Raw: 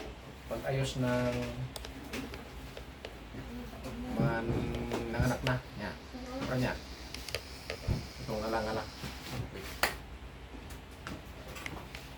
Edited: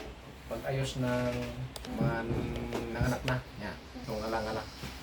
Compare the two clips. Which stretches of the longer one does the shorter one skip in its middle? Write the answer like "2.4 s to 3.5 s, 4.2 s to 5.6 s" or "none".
1.8 s to 4.0 s, 6.1 s to 8.1 s